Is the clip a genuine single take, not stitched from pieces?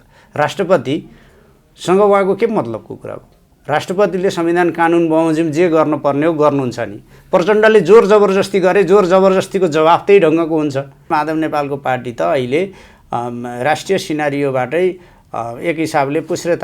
no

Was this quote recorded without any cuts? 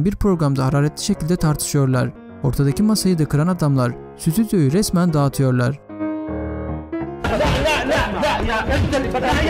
yes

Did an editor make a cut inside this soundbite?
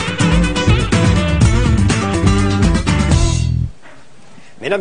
no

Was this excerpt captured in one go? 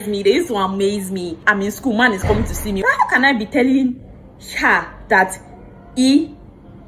no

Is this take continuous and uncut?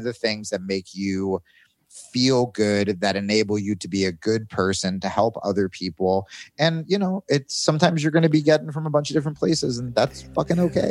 yes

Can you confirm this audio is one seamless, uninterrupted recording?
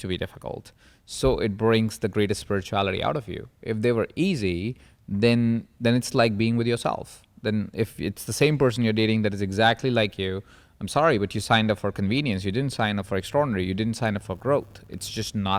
yes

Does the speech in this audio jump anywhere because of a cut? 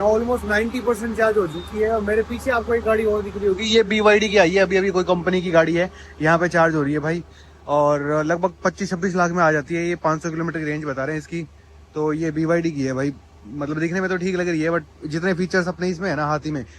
no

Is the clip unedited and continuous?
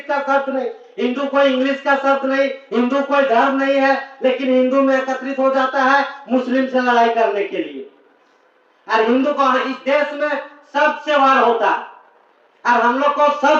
yes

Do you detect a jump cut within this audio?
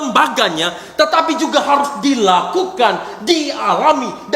no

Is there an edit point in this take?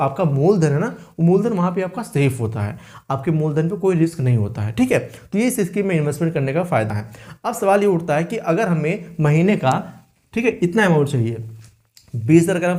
no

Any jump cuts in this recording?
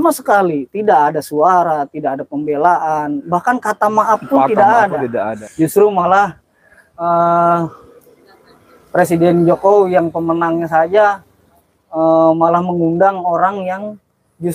yes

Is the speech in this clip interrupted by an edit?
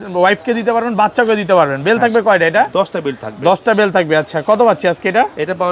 no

